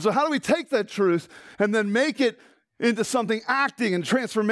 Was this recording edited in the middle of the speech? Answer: no; 0 cuts

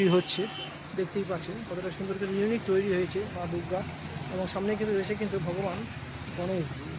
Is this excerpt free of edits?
yes; 0 cuts

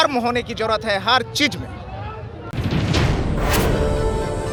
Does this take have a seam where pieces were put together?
no; 0 cuts

